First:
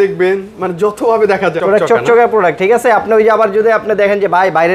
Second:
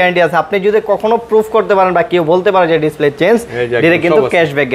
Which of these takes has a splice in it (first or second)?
first